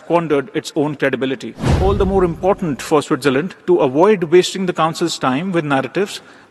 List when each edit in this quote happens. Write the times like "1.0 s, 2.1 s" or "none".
1.7 s